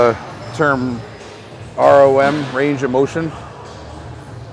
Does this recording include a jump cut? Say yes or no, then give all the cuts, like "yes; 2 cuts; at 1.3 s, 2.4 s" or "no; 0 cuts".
no; 0 cuts